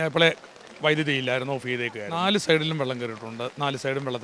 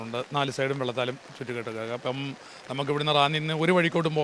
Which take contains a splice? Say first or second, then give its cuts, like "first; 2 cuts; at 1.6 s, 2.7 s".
first; 1 cut; at 2.0 s